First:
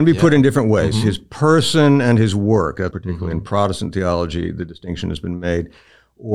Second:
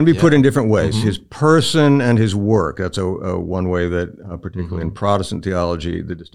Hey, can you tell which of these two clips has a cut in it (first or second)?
first